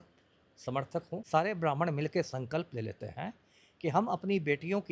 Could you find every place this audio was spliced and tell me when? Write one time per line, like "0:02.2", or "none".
0:01.2

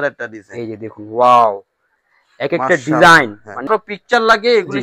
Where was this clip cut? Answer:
0:03.7

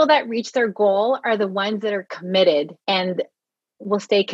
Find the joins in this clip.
0:02.8

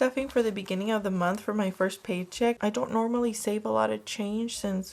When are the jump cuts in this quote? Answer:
0:02.6

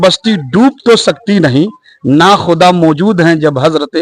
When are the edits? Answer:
none

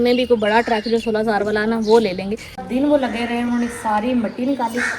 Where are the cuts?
0:02.6

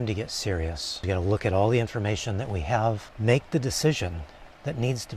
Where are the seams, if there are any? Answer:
0:00.9
0:03.1

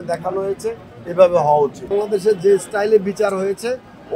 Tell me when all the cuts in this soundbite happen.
0:01.9

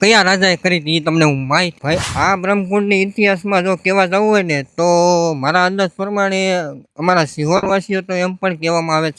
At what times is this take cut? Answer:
0:01.7

